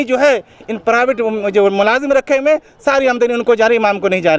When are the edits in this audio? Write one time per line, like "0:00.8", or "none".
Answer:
none